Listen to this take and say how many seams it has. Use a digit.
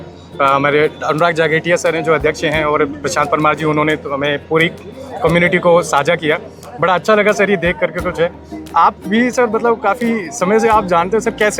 0